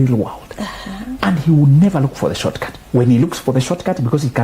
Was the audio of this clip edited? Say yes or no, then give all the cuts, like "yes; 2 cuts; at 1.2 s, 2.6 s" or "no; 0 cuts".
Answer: yes; 2 cuts; at 1.1 s, 2.7 s